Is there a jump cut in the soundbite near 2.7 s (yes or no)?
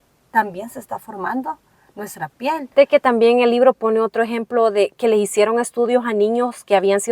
yes